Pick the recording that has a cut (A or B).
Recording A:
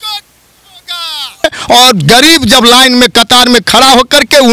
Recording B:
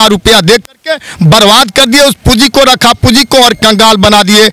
A